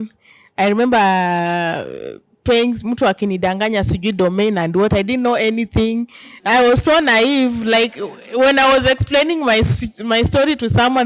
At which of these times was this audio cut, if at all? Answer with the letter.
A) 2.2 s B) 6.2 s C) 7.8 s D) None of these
D